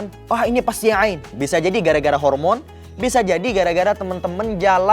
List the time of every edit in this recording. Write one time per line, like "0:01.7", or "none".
0:01.4